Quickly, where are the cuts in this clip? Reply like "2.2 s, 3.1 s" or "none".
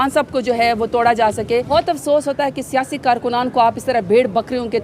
1.7 s

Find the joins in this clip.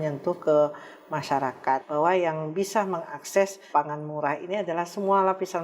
1.9 s, 3.7 s

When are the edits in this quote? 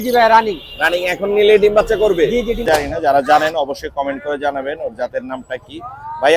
2.6 s

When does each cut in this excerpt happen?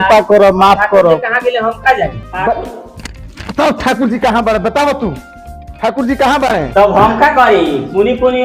2.1 s, 6.7 s

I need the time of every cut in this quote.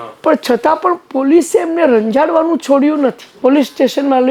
3.4 s

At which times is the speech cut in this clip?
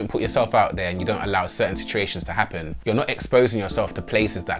none

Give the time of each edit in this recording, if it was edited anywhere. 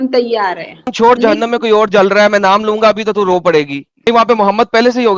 0.9 s, 4.1 s

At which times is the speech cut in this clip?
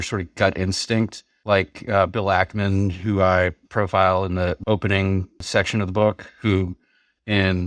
1.3 s, 3.6 s, 4.6 s, 5.5 s

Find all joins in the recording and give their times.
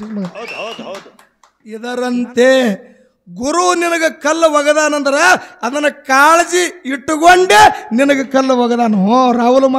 1.8 s

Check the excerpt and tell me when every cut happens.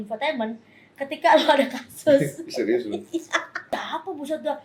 3.6 s

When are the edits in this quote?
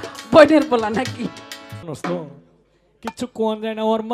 1.9 s

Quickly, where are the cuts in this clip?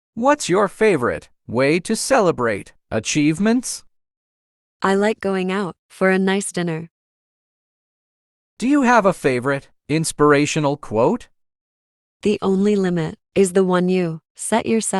1.3 s

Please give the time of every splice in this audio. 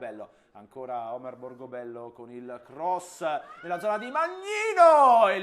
1.4 s

